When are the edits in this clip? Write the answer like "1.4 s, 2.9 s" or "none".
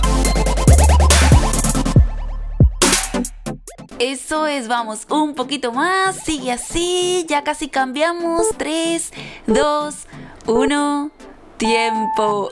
3.6 s